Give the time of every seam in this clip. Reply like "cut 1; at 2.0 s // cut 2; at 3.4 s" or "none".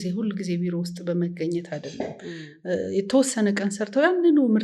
none